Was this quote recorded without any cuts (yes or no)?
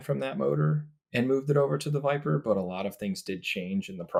yes